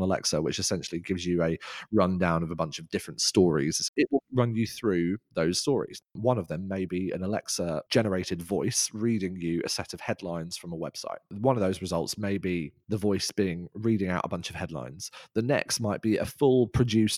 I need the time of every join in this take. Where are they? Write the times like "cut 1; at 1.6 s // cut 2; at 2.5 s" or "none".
cut 1; at 3.9 s // cut 2; at 6.1 s